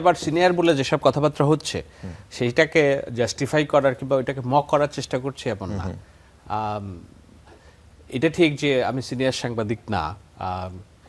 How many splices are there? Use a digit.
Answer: 0